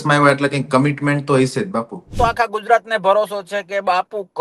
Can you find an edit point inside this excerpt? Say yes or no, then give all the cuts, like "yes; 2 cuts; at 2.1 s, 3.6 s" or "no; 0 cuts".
yes; 1 cut; at 2.2 s